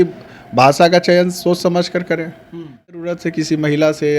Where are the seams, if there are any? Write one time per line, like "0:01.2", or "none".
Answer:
0:03.0